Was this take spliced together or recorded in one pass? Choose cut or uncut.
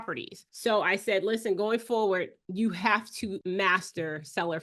cut